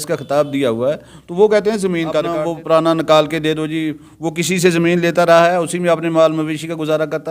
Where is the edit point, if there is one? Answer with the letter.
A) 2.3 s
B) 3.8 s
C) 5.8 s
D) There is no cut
A